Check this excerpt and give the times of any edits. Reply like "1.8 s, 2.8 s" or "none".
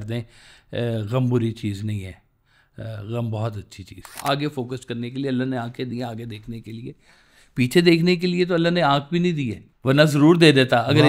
4.2 s, 9.6 s